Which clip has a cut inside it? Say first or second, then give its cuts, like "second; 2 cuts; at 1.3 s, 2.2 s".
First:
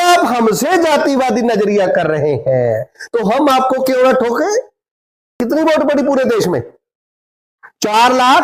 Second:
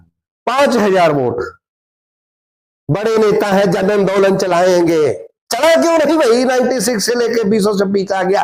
first; 1 cut; at 5.4 s